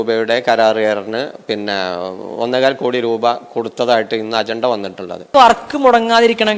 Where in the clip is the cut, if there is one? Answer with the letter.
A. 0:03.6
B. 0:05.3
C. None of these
B